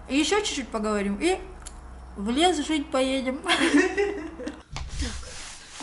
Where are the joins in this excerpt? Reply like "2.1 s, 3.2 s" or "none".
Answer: none